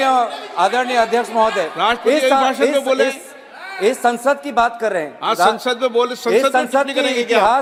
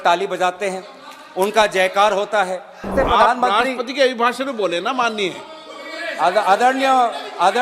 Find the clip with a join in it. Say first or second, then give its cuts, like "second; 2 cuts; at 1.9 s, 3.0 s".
second; 1 cut; at 2.9 s